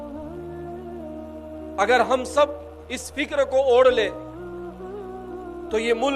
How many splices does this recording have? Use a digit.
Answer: 1